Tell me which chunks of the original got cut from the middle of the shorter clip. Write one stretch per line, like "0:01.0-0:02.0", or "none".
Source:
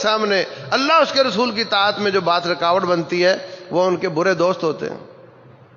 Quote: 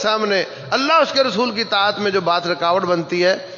none